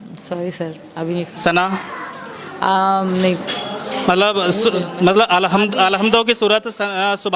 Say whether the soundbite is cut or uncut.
uncut